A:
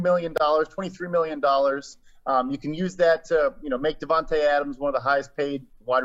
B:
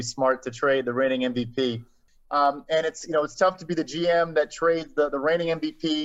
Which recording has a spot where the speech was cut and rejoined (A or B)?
B